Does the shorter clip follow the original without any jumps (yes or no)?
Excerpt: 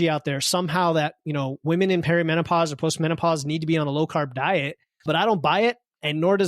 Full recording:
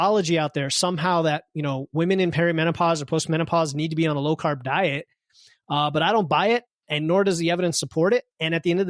no